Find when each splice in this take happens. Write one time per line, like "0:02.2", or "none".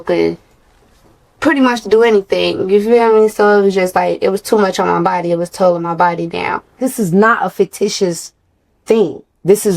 0:06.8